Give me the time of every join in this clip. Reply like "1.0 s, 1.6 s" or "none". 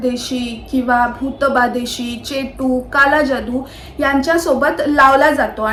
none